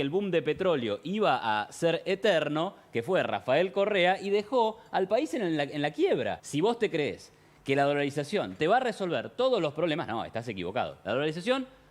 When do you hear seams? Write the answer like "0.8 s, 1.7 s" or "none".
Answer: 6.4 s

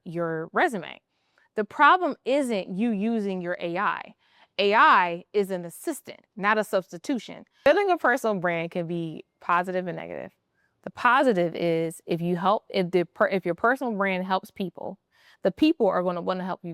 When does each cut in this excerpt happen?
7.7 s

